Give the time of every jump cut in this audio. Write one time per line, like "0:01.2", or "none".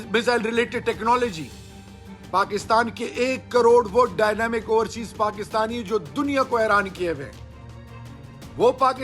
none